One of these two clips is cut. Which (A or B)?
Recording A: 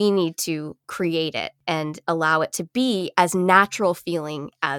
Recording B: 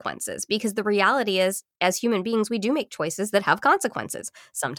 A